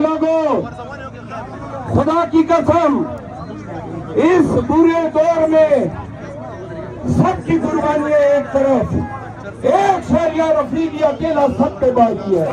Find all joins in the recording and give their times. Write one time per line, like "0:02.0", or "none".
none